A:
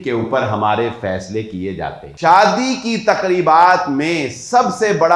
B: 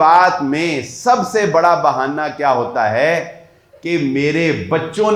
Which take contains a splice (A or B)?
A